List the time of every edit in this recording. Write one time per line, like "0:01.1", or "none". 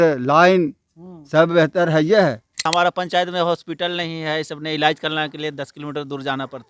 0:02.7